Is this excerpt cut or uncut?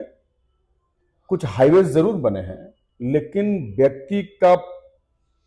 uncut